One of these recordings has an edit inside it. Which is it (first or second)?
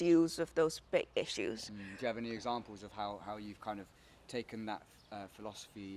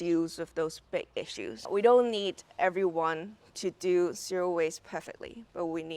second